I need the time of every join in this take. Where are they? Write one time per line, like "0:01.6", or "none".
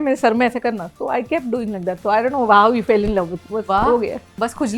0:03.4